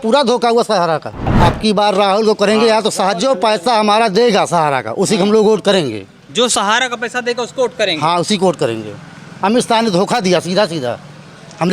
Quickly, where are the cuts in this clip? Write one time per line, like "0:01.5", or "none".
0:01.3